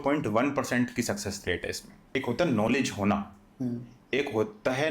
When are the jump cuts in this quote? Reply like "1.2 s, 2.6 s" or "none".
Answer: 2.2 s